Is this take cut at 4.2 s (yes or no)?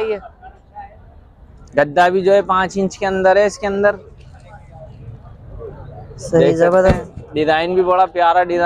no